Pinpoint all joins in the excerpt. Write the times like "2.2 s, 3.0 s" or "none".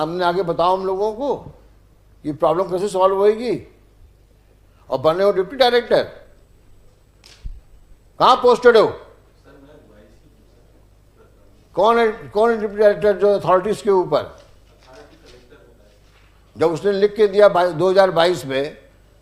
none